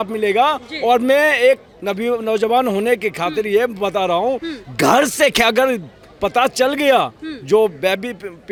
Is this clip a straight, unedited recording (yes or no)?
yes